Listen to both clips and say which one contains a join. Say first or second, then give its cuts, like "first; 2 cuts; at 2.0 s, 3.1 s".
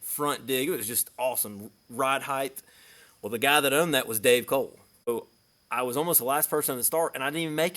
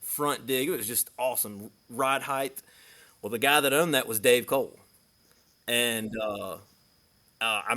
first; 1 cut; at 5.1 s